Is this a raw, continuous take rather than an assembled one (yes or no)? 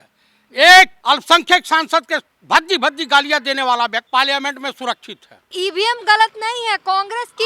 no